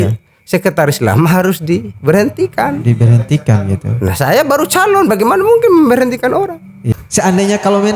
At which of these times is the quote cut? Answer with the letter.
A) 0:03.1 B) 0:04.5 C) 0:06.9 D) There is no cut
C